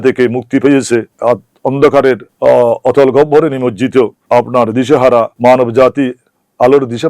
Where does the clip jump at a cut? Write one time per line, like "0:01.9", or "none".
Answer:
0:01.1
0:02.3
0:04.2
0:05.3